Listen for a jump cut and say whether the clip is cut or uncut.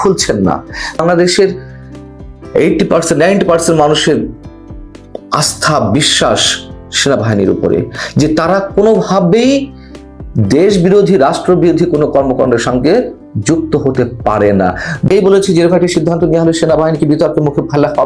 cut